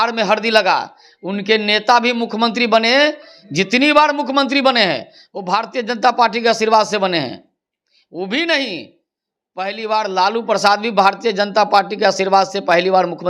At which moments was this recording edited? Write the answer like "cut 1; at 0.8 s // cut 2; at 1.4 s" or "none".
none